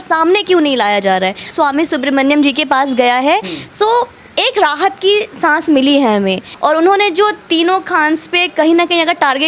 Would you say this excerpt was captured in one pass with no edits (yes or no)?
no